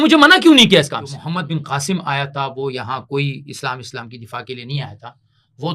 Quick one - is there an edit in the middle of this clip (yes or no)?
yes